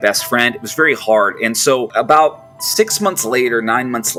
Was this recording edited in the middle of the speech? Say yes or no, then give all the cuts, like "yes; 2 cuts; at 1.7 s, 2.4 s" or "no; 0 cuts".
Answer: no; 0 cuts